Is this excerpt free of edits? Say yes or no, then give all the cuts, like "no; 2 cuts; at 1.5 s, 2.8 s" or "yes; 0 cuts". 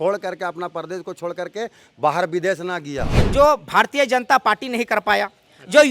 no; 1 cut; at 3.2 s